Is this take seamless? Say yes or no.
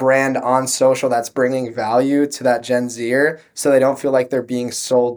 yes